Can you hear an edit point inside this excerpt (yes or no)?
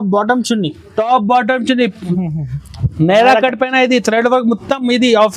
yes